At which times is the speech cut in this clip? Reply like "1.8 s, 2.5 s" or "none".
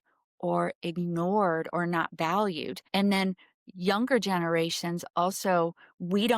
2.7 s